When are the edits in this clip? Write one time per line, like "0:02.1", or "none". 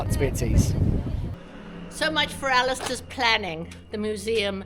0:01.4